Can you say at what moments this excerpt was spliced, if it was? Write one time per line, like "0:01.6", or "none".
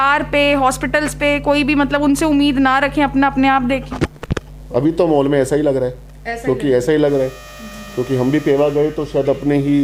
none